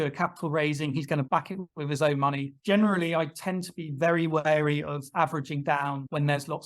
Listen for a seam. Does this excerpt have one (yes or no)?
yes